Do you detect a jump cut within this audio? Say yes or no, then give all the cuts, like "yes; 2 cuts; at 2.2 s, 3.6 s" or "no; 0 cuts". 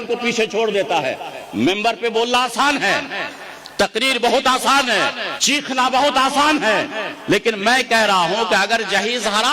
yes; 1 cut; at 5.3 s